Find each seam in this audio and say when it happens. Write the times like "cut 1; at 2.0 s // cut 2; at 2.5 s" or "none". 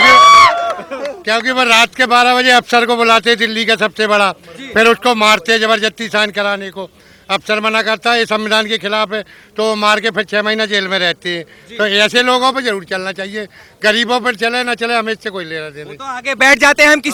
none